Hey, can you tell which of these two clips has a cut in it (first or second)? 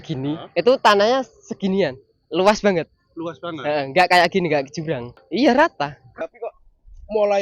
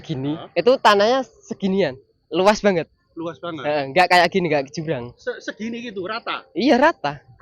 first